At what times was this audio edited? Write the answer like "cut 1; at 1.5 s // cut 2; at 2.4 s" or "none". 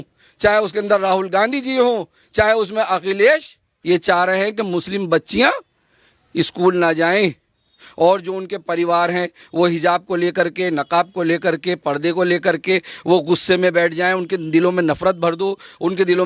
cut 1; at 3.7 s